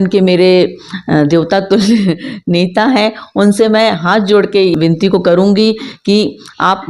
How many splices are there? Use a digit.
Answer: 1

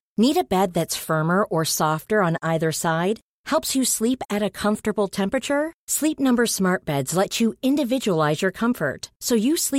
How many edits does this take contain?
0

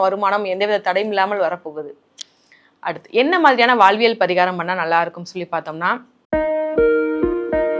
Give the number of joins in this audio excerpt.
1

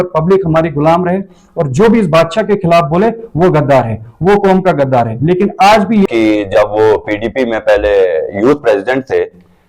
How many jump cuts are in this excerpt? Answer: 1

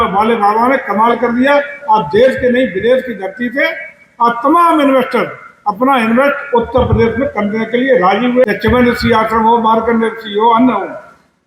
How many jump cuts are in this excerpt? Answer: 1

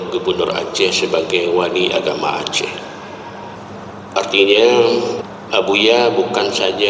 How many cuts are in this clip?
2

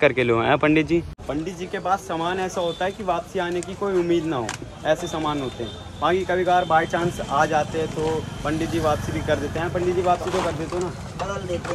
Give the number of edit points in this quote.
1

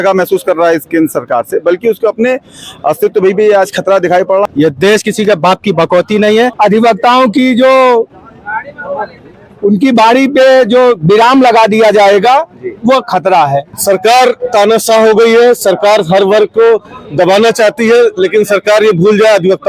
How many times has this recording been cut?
3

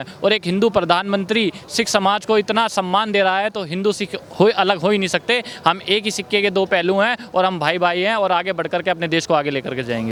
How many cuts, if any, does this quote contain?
0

